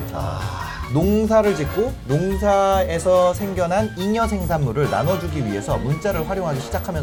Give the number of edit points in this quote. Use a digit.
0